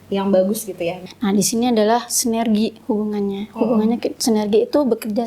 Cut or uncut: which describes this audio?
cut